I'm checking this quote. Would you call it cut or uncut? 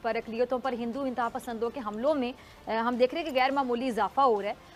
uncut